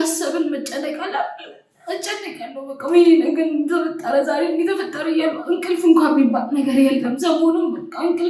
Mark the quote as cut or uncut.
uncut